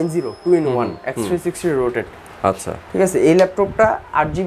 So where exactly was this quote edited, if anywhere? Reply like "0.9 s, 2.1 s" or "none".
none